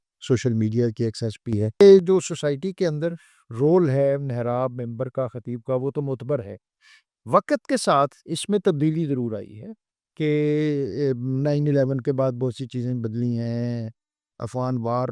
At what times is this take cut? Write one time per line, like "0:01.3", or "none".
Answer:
0:01.8